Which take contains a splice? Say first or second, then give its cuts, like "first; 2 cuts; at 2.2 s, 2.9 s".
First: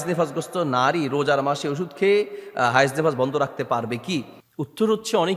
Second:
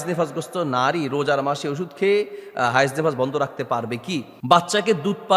second; 1 cut; at 4.3 s